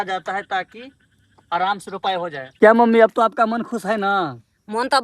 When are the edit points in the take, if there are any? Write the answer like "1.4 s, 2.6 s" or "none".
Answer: 2.5 s